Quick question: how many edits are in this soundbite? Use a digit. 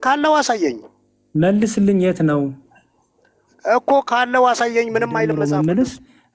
1